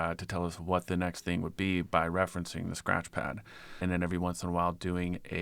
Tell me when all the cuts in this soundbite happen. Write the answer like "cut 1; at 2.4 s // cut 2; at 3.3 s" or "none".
cut 1; at 3.8 s